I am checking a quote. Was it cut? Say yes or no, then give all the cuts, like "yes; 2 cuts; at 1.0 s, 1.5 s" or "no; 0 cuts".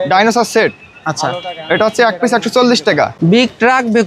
yes; 1 cut; at 3.1 s